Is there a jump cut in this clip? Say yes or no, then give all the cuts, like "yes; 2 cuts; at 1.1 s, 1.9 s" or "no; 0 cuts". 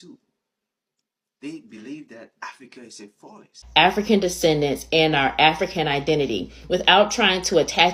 yes; 1 cut; at 3.5 s